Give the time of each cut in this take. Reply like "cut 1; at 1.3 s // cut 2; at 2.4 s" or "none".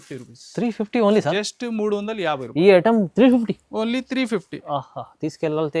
none

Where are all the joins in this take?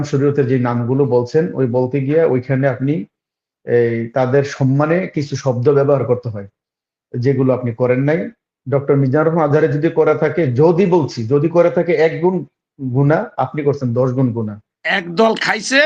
cut 1; at 14.8 s

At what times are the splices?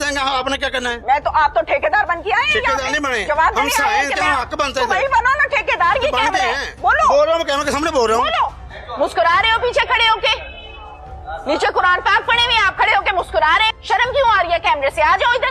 cut 1; at 8.7 s // cut 2; at 13.8 s

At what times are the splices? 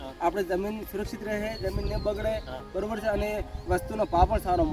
none

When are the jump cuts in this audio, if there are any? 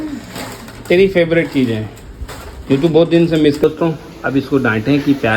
cut 1; at 3.6 s

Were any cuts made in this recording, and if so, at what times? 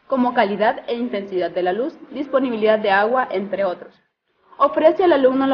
none

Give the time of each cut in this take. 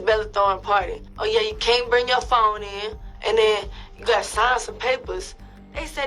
cut 1; at 1.1 s

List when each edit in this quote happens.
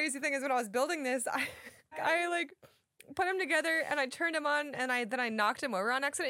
cut 1; at 2.0 s

